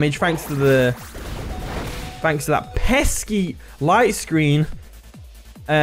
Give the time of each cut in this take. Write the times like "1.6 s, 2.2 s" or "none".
none